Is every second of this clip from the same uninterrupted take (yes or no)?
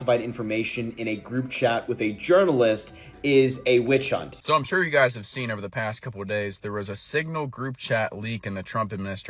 no